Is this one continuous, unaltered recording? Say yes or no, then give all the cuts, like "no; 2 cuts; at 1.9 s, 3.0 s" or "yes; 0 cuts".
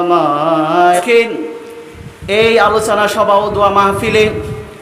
no; 1 cut; at 1.0 s